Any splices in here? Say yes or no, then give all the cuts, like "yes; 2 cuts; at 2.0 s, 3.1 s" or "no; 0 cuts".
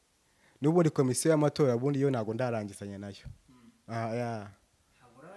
no; 0 cuts